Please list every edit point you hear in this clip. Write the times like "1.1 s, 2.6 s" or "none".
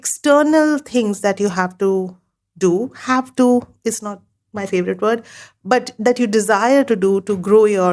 none